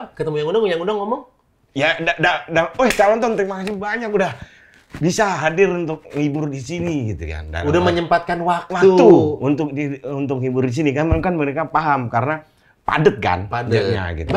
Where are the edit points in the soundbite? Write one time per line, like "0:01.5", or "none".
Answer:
none

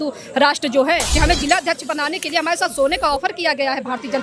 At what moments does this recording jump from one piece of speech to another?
0:01.1

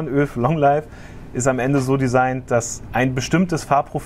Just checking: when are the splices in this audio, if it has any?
none

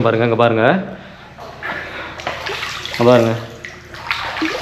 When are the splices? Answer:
none

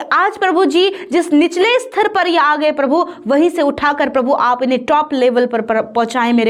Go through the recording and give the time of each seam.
none

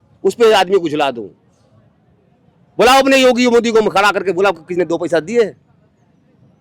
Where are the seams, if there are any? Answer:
none

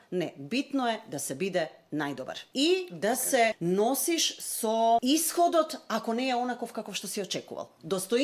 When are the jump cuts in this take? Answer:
0:02.4
0:03.6
0:05.0

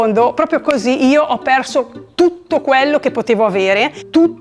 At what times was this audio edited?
none

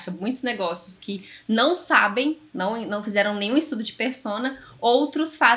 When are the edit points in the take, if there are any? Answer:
none

